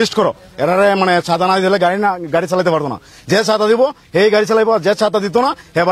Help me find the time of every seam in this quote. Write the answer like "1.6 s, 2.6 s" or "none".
none